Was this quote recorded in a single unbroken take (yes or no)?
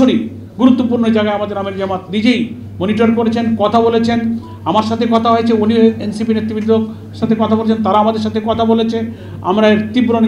yes